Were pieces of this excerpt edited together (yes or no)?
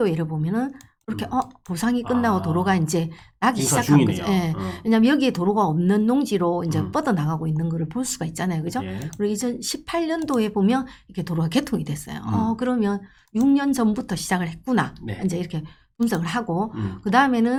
no